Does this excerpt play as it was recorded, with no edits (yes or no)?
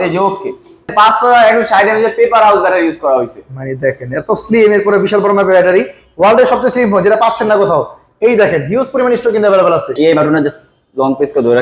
no